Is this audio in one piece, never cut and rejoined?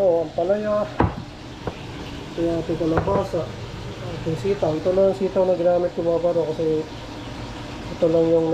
yes; 0 cuts

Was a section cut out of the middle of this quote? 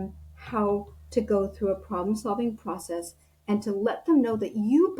no; 0 cuts

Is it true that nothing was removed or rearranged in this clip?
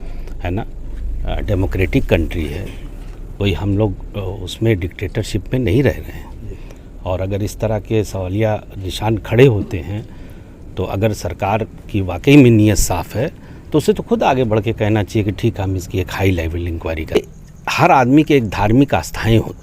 no; 1 cut; at 17.1 s

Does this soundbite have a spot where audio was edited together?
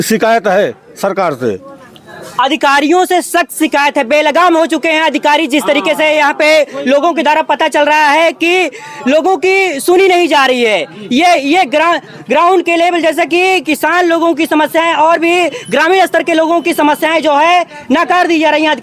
no; 0 cuts

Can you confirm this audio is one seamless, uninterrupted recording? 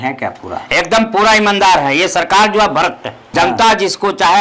no; 1 cut; at 3.2 s

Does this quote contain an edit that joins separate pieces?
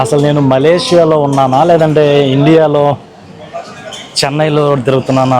no; 0 cuts

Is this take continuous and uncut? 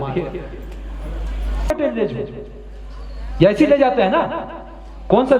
no; 1 cut; at 1.8 s

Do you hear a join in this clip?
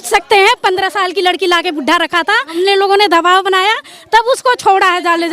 yes; 1 cut; at 2.5 s

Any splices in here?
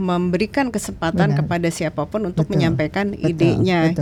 no; 0 cuts

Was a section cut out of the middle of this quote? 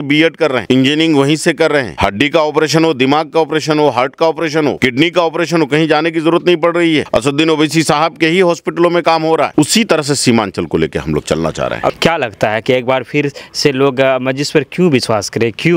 yes; 1 cut; at 11.9 s

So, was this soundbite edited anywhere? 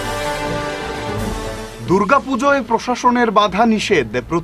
no; 0 cuts

